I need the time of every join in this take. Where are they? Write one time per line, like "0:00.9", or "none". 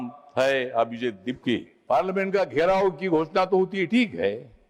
0:01.7